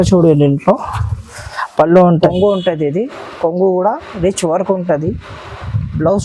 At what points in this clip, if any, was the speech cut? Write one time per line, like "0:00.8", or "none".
0:02.3